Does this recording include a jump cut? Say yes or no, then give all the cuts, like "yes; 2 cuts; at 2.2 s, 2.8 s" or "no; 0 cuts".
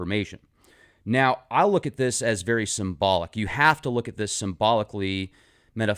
no; 0 cuts